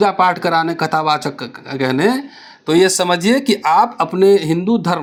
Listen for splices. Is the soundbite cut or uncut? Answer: uncut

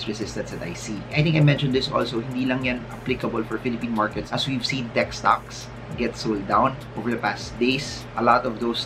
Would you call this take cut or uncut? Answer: uncut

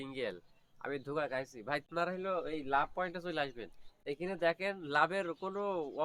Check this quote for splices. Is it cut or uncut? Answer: uncut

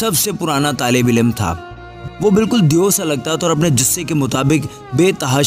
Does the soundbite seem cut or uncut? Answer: uncut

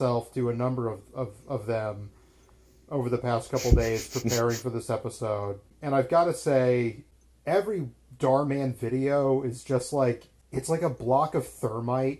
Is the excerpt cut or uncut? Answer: cut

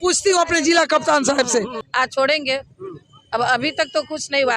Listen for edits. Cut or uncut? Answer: cut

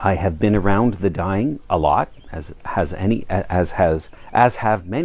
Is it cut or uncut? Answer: cut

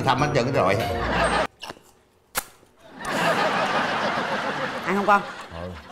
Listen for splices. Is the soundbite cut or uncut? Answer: cut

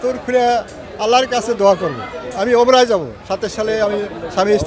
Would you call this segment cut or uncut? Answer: uncut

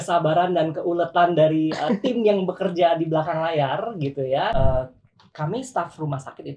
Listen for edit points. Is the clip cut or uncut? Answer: cut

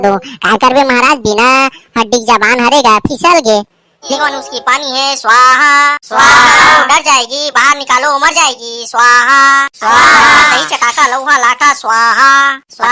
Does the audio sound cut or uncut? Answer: cut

